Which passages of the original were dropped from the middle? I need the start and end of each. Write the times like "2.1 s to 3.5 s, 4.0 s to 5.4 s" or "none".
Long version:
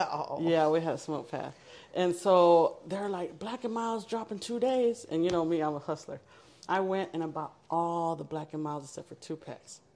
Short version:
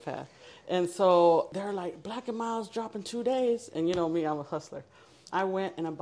2.8 s to 2.9 s